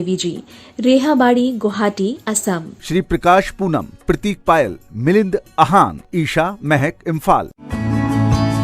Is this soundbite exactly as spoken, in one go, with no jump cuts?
no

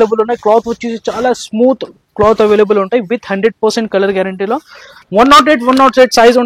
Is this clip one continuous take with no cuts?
no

